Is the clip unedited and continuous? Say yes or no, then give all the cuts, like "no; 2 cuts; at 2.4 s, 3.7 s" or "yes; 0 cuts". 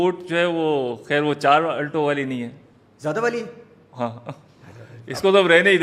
yes; 0 cuts